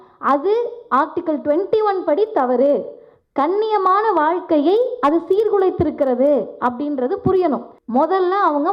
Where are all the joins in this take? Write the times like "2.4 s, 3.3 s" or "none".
7.7 s

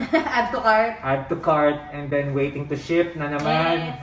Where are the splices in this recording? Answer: none

